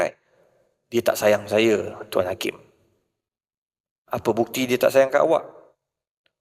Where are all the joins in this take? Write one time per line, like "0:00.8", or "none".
none